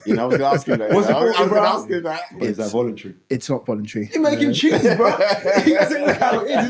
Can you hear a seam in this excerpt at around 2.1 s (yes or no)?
yes